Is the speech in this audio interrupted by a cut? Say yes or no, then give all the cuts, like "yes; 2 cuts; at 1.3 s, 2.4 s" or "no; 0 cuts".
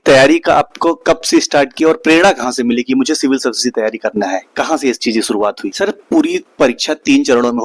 yes; 1 cut; at 5.7 s